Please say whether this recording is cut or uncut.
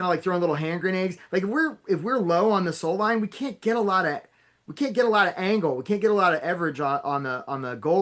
uncut